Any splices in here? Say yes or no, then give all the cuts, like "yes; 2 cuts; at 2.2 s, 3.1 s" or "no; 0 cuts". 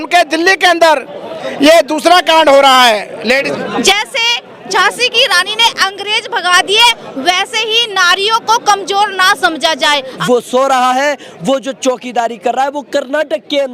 yes; 2 cuts; at 3.5 s, 10.1 s